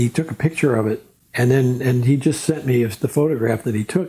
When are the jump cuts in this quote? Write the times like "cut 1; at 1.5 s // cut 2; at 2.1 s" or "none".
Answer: none